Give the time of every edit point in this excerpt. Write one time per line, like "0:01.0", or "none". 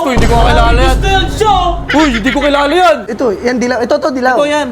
0:03.1